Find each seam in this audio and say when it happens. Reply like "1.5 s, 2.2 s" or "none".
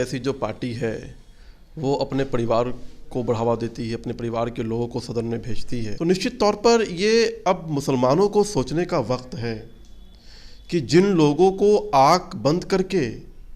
5.9 s